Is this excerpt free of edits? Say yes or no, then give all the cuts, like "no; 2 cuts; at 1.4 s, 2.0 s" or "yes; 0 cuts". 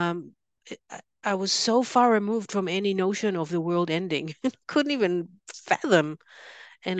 yes; 0 cuts